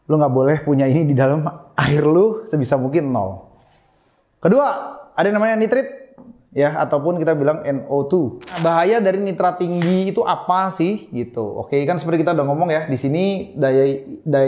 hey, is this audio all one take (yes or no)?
no